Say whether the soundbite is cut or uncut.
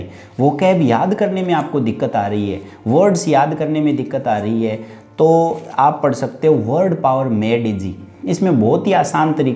uncut